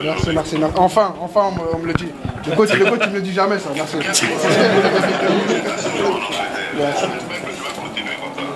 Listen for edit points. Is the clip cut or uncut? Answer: uncut